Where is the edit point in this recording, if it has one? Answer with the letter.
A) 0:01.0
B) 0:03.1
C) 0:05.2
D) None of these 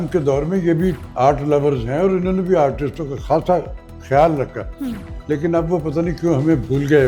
A